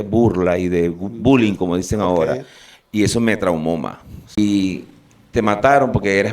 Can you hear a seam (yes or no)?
yes